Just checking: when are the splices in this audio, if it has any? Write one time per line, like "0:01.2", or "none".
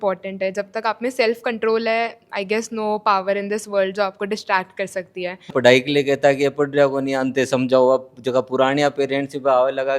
0:05.5